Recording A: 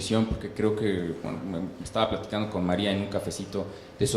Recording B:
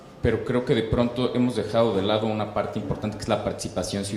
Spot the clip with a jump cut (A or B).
A